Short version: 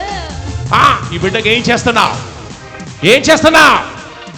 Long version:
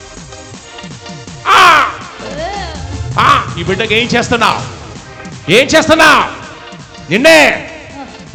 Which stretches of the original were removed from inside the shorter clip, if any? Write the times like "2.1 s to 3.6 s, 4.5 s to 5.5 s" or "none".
none